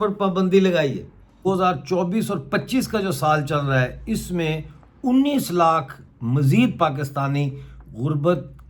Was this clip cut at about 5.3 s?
no; 1 cut; at 1.4 s

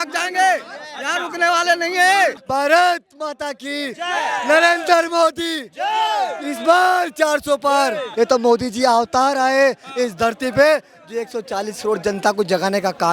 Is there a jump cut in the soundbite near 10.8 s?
no; 2 cuts; at 2.4 s, 8.0 s

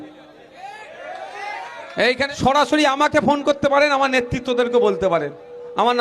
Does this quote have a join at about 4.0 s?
no; 1 cut; at 2.2 s

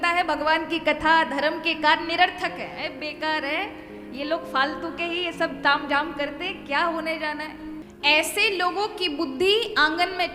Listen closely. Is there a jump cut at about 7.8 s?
yes; 1 cut; at 7.8 s

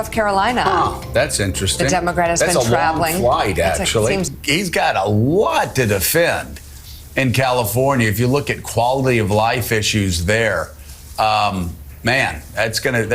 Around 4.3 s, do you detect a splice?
yes; 1 cut; at 4.3 s

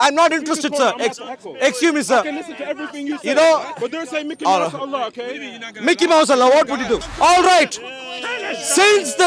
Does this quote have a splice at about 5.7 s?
no; 1 cut; at 7.1 s

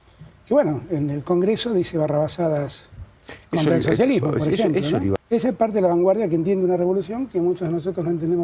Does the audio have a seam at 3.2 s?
no; 1 cut; at 5.2 s

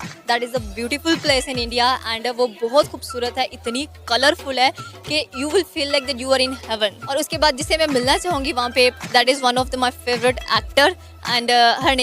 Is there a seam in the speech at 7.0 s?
yes; 1 cut; at 7.0 s

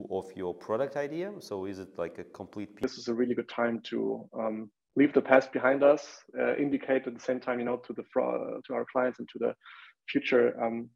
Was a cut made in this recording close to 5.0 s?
no; 1 cut; at 2.8 s

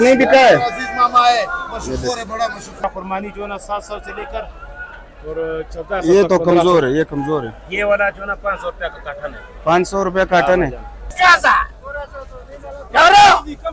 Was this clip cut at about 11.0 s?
yes; 2 cuts; at 2.8 s, 11.0 s

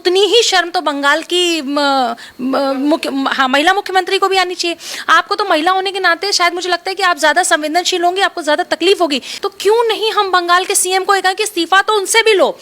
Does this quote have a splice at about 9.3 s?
yes; 1 cut; at 9.3 s

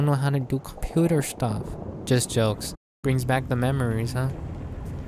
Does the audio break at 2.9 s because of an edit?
yes; 1 cut; at 2.9 s

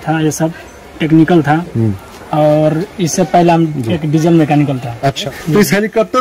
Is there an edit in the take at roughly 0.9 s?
no; 1 cut; at 5.3 s

